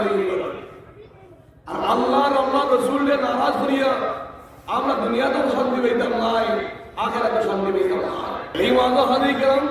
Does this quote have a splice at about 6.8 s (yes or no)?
no